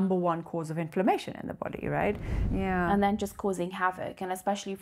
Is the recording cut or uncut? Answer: cut